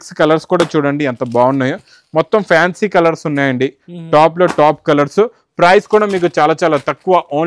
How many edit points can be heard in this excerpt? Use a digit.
0